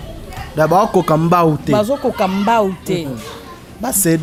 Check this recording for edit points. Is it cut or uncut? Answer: uncut